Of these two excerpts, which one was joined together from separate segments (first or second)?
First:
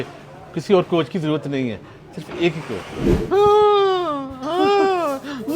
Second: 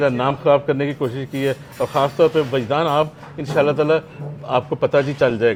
first